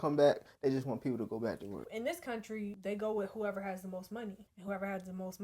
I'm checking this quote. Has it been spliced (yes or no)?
yes